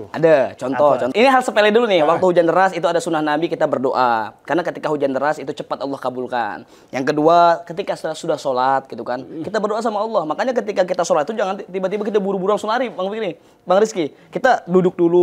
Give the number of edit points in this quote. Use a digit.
1